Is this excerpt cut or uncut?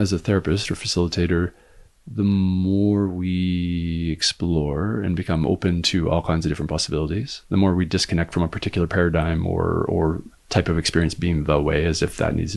cut